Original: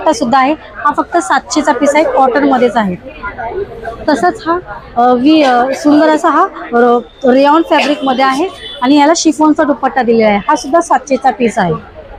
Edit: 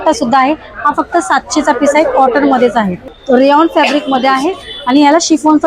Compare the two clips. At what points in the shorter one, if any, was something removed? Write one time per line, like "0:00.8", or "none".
0:03.2